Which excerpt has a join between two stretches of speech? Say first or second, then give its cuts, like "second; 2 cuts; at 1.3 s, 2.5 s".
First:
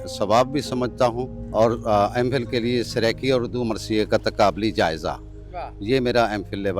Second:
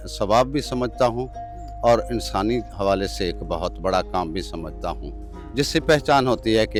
first; 1 cut; at 1.3 s